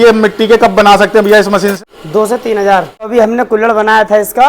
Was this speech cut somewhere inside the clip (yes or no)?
yes